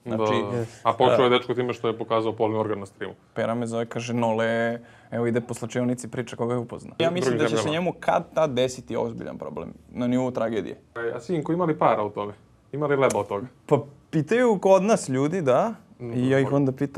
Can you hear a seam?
yes; 3 cuts; at 3.2 s, 7.0 s, 11.2 s

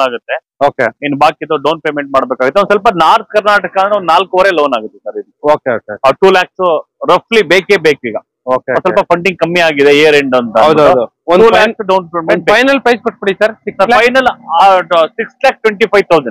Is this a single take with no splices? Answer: yes; 0 cuts

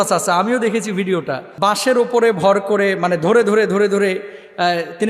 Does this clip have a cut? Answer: yes; 1 cut; at 1.4 s

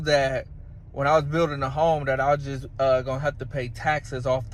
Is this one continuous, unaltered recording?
yes; 0 cuts

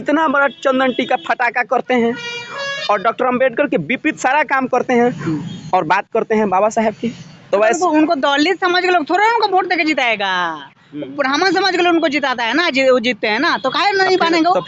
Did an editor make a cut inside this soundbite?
no; 0 cuts

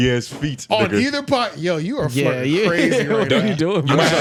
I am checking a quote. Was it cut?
no; 0 cuts

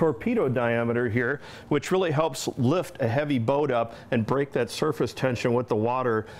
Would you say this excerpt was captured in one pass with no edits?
no; 1 cut; at 2.3 s

